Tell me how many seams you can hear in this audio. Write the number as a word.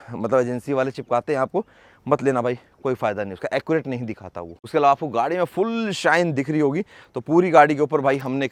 zero